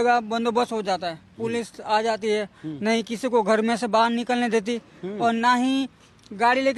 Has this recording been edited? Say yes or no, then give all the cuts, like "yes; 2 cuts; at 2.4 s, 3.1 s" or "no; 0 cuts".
no; 0 cuts